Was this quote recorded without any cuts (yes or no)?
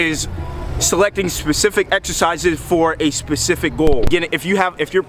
no